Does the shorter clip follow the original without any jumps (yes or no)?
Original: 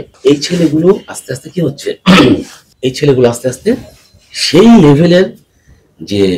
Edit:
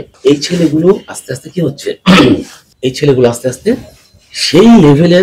yes